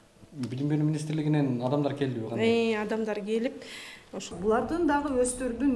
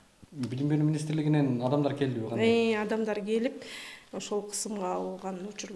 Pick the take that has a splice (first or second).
first